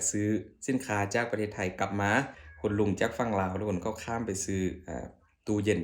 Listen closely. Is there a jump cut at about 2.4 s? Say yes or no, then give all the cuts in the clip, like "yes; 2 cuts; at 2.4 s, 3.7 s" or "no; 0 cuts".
yes; 1 cut; at 2.4 s